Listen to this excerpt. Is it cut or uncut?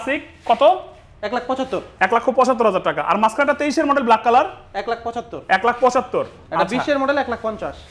uncut